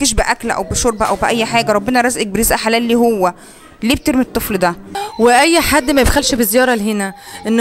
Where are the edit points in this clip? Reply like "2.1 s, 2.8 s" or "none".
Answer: 5.0 s